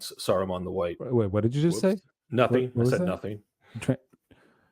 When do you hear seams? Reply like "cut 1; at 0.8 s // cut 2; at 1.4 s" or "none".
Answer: cut 1; at 1.0 s